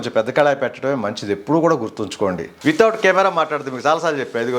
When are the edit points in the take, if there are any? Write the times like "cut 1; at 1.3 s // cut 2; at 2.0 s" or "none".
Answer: cut 1; at 2.5 s